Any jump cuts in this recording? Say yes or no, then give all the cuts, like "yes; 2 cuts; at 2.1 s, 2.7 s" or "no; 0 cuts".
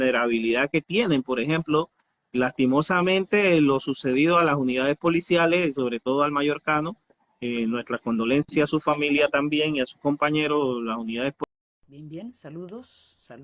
yes; 1 cut; at 11.4 s